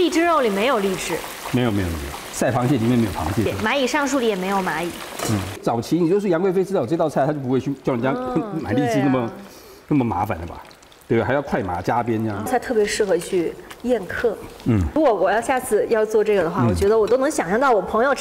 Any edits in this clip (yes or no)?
yes